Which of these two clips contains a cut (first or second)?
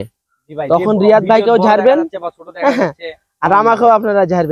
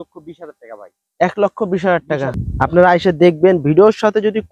second